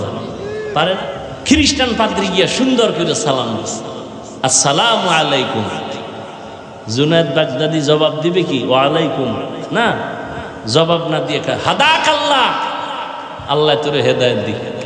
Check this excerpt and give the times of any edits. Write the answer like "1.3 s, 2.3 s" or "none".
1.3 s